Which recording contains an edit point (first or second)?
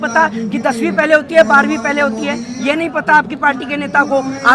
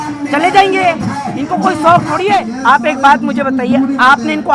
second